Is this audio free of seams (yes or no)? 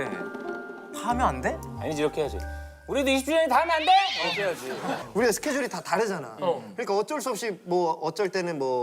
no